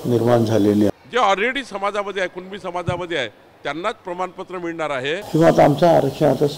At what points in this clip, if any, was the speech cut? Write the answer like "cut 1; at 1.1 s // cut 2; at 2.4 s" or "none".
cut 1; at 0.9 s // cut 2; at 5.2 s